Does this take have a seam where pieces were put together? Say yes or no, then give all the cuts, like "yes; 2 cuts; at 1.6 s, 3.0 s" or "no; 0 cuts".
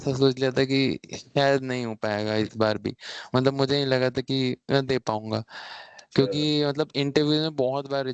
no; 0 cuts